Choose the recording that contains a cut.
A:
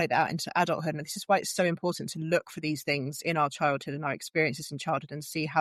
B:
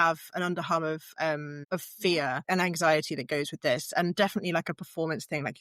B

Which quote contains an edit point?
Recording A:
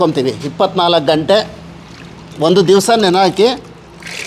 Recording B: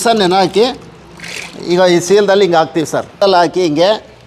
B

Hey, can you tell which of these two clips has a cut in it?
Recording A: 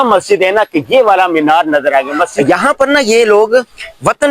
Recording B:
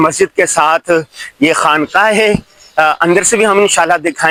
A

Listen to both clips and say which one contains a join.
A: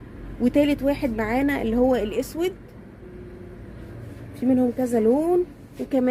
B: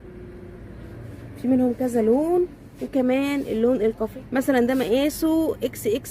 B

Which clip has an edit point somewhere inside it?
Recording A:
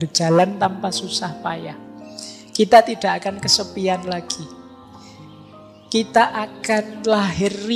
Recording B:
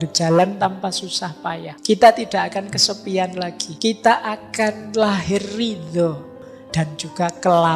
B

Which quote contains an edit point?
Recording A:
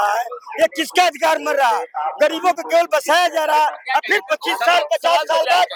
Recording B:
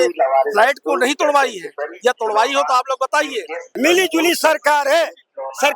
B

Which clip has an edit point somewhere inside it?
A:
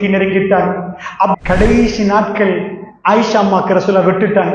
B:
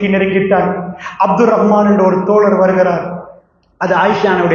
A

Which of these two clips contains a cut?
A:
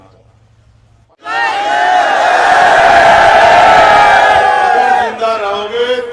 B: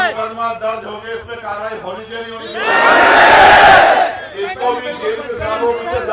A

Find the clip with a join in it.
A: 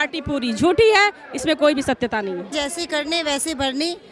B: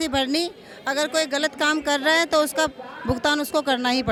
A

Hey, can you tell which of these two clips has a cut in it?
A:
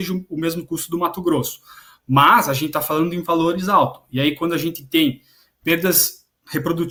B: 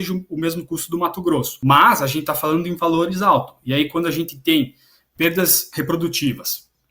B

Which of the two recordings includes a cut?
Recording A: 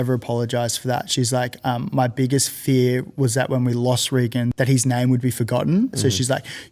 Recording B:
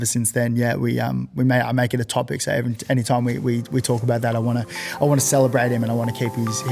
A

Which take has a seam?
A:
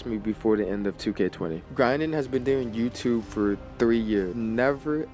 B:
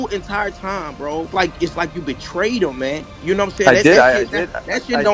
A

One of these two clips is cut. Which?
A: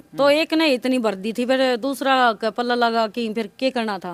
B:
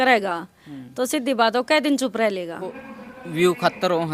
B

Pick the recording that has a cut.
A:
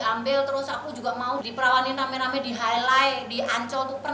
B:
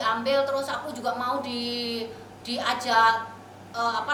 A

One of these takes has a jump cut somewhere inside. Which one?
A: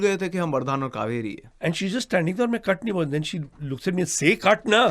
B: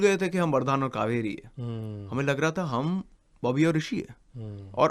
A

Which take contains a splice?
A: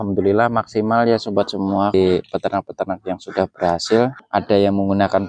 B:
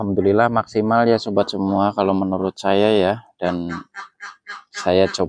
A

